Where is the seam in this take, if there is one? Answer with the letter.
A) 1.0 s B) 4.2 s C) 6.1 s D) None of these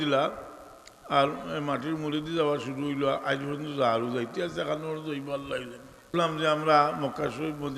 C